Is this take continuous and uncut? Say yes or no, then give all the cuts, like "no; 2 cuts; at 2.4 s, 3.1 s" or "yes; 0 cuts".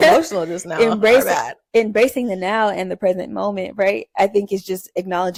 yes; 0 cuts